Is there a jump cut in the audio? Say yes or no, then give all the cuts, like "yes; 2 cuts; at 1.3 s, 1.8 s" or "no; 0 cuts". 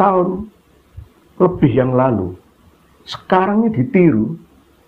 no; 0 cuts